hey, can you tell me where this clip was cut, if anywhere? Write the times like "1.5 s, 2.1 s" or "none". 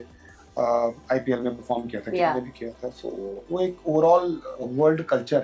none